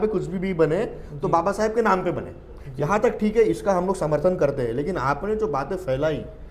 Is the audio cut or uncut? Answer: uncut